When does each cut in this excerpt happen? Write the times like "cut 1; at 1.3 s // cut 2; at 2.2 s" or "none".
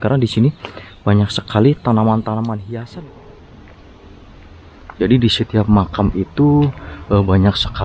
cut 1; at 2.7 s